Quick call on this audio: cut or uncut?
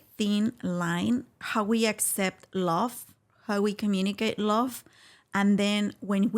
cut